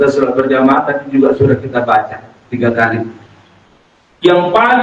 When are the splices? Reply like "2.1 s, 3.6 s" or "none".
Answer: none